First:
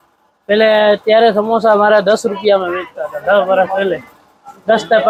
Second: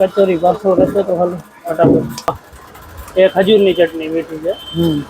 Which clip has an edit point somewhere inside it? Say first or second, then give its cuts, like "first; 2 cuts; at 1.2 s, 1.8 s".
second; 1 cut; at 2.3 s